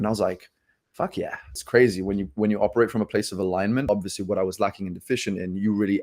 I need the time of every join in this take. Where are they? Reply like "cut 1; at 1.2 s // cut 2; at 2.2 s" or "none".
cut 1; at 1.5 s // cut 2; at 3.8 s